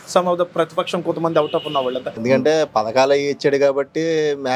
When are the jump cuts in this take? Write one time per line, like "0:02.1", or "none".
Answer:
0:02.1